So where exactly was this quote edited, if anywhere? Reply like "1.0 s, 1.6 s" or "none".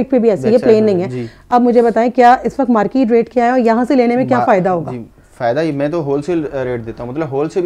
none